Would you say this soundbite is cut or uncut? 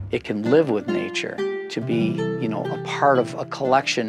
cut